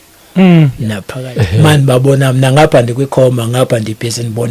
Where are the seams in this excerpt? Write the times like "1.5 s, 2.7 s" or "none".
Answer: 1.1 s